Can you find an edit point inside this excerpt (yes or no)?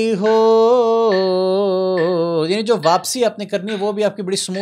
no